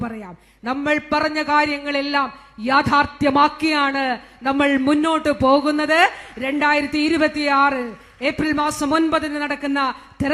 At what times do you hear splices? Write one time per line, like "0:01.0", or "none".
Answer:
none

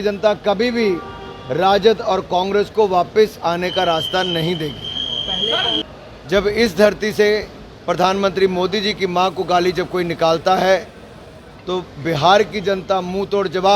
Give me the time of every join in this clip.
0:05.8

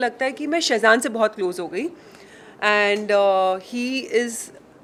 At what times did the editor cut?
none

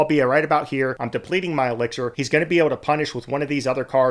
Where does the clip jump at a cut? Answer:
0:01.0
0:02.2

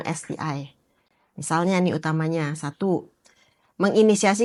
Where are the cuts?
none

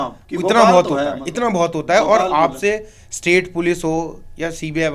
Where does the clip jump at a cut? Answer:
none

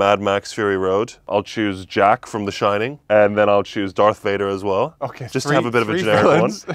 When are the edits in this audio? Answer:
0:01.3
0:03.0

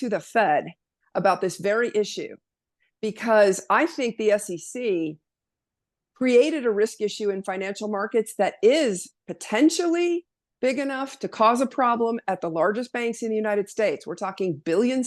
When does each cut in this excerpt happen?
none

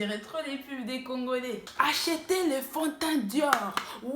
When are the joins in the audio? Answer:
0:01.7

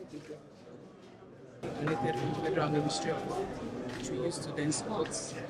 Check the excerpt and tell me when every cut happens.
0:01.6

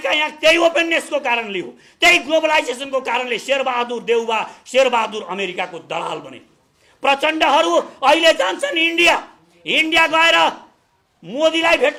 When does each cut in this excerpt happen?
none

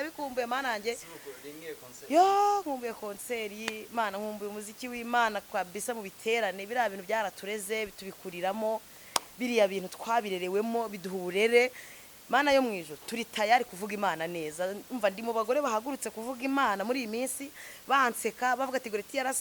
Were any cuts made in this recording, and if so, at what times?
none

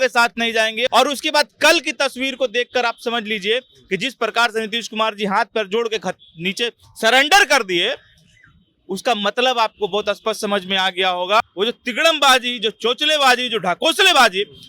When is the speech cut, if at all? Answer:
0:00.9
0:11.4

